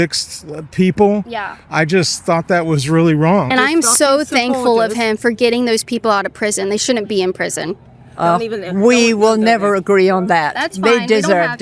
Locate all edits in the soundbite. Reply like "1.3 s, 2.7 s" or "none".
3.5 s